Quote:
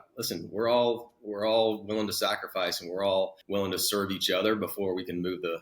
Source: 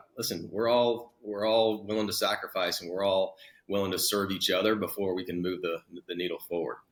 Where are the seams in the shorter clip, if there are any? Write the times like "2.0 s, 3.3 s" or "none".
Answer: 3.4 s

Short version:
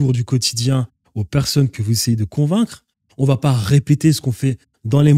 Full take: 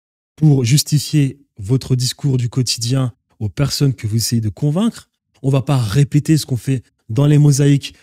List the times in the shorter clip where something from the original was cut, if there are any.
none

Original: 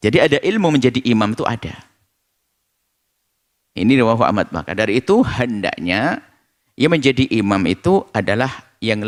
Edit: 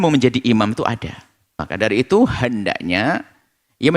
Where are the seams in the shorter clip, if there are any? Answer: 1.6 s

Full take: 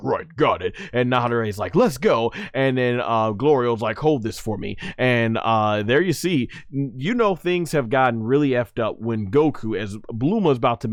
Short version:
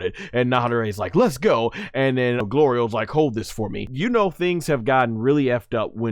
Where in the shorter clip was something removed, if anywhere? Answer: 2.4 s, 3.9 s

